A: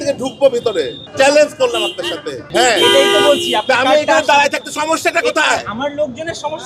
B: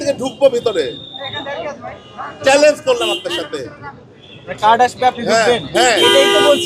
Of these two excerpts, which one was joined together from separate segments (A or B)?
A